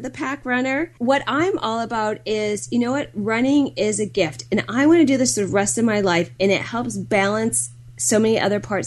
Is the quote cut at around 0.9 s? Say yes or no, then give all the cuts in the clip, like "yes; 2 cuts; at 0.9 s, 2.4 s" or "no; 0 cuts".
yes; 1 cut; at 0.9 s